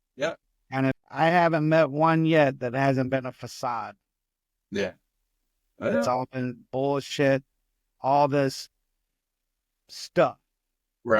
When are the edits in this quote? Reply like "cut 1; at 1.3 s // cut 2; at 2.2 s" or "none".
cut 1; at 1.0 s